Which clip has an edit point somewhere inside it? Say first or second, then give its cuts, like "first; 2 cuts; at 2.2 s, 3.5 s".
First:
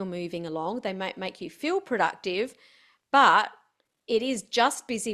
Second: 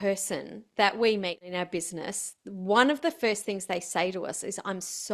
second; 1 cut; at 1.4 s